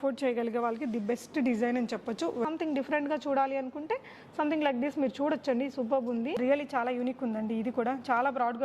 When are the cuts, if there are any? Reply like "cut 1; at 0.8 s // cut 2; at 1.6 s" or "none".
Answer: cut 1; at 2.4 s // cut 2; at 6.4 s